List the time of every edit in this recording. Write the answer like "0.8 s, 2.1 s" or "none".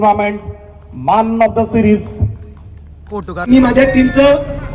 3.5 s